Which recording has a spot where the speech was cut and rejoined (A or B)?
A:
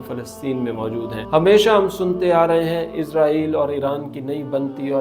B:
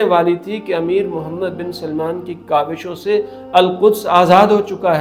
A